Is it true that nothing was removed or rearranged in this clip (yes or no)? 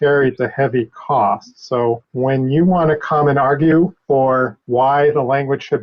no